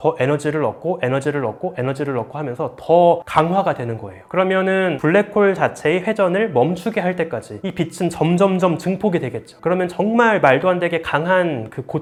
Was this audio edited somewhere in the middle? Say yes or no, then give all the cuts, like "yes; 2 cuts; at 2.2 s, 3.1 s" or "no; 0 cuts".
no; 0 cuts